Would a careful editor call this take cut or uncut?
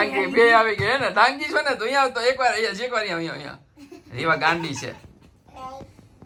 uncut